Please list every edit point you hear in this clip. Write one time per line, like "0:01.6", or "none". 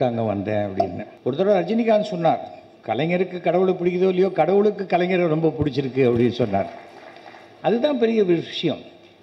0:01.1